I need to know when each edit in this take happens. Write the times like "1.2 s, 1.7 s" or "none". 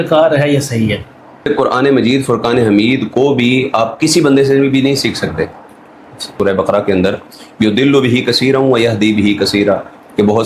1.5 s, 6.3 s